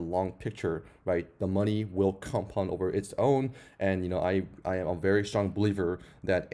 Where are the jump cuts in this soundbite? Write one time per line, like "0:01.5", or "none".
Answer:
none